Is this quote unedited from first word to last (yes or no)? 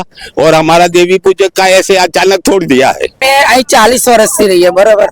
no